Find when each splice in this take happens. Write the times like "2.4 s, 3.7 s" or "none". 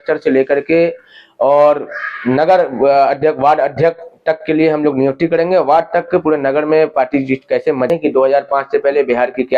7.9 s